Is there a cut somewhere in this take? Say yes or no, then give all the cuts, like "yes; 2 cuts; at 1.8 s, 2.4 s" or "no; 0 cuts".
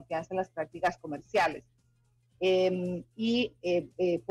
no; 0 cuts